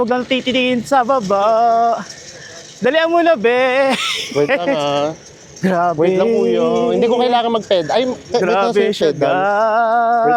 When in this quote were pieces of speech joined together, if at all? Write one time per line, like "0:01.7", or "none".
none